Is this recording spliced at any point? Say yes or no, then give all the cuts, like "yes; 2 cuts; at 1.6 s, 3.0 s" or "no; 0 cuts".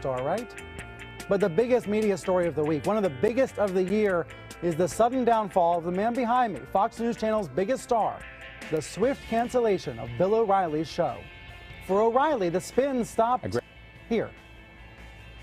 yes; 1 cut; at 3.9 s